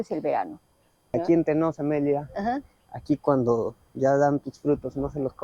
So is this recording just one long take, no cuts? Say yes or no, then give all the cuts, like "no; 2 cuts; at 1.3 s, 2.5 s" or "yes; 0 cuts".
no; 1 cut; at 1.2 s